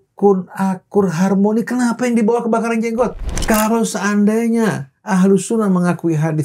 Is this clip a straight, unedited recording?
no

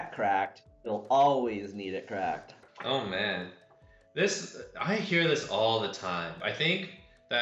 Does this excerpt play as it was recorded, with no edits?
yes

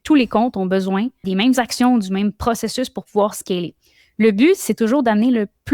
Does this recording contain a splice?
yes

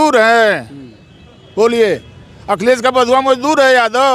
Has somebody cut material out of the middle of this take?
no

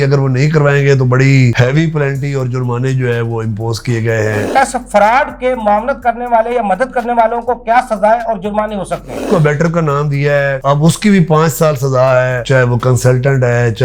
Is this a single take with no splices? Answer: no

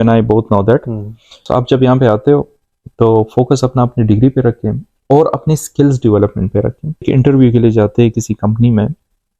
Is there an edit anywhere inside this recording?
yes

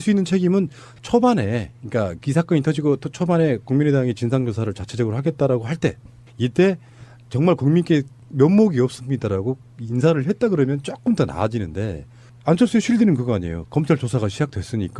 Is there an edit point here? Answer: yes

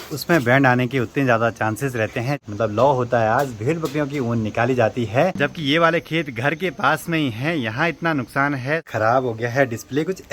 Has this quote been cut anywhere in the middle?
yes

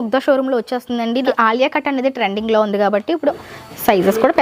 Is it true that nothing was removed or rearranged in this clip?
no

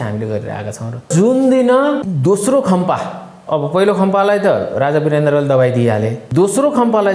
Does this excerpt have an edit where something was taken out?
yes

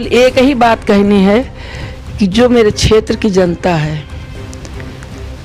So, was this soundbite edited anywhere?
no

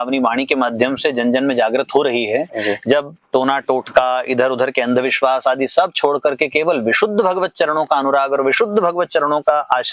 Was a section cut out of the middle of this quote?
no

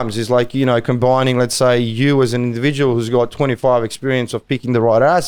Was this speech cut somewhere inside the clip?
no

